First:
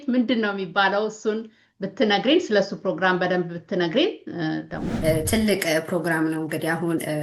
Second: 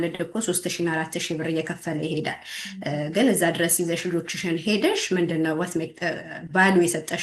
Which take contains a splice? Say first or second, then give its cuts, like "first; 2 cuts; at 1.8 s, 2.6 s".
first; 1 cut; at 4.8 s